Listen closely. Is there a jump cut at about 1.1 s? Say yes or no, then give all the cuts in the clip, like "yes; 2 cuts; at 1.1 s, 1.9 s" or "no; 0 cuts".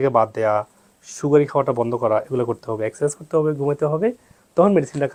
no; 0 cuts